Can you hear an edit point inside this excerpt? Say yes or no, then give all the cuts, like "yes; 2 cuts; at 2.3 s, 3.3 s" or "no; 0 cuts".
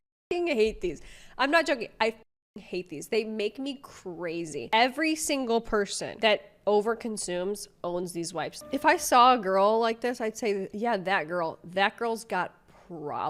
yes; 3 cuts; at 4.6 s, 8.6 s, 10.7 s